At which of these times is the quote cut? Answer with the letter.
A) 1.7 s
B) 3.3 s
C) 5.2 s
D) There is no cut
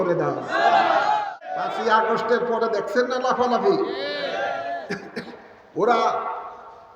A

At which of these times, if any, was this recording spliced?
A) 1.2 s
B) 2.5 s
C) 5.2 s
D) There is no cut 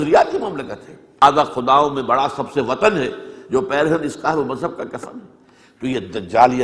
A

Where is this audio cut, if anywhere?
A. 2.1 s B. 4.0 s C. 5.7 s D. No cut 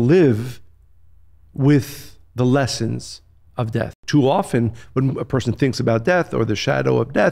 B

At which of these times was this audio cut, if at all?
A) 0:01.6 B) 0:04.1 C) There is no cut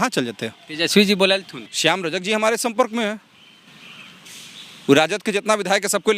A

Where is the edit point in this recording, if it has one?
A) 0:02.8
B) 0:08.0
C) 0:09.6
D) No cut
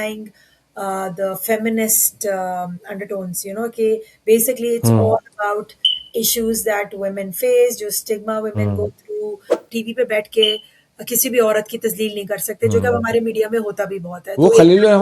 C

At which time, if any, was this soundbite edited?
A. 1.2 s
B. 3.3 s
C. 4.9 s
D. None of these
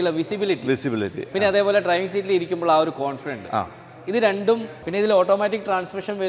C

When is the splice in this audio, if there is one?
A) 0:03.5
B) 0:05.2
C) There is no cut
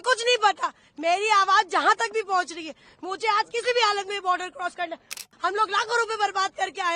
B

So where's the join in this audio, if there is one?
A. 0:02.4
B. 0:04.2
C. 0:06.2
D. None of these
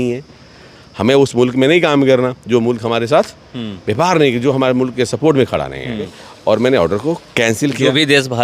C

